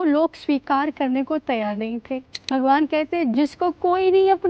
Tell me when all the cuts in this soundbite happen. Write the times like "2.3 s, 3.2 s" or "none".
2.3 s, 3.3 s